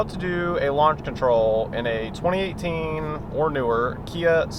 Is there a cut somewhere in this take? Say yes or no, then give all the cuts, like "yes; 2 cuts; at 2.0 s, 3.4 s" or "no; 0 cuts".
no; 0 cuts